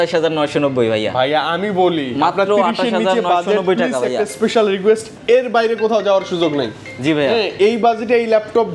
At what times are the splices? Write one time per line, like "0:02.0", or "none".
none

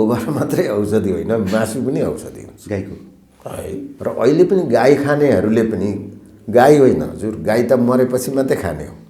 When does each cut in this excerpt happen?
0:03.9

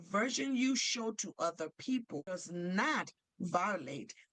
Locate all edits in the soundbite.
0:02.4

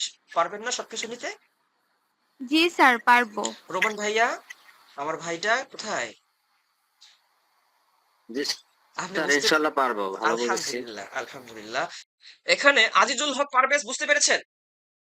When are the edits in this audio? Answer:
0:12.0

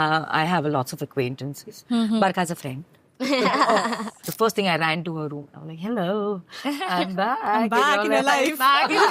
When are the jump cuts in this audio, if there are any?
0:04.2

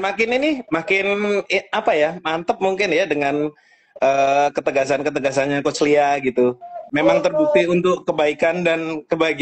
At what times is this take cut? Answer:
0:06.7

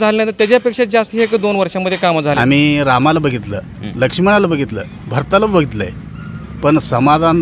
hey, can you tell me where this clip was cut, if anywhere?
0:02.4

